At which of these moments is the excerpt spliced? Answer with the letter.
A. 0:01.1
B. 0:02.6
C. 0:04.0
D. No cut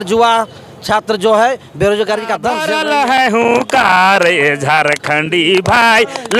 B